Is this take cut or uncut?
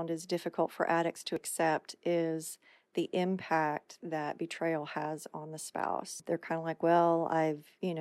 cut